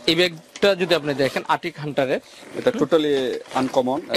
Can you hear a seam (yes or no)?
no